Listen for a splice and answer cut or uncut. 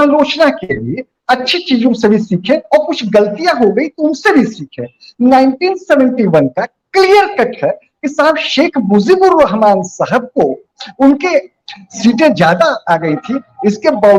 uncut